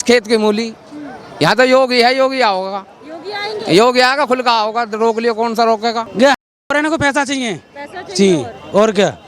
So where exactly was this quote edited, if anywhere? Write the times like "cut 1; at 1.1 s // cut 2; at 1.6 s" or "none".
cut 1; at 6.1 s